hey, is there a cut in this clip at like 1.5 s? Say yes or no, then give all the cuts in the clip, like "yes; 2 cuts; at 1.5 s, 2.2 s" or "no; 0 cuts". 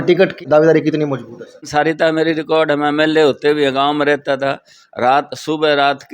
yes; 1 cut; at 1.5 s